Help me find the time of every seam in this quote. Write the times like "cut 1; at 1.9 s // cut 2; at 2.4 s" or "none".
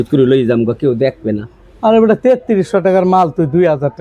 none